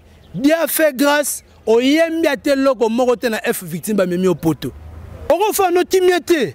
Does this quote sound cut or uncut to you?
cut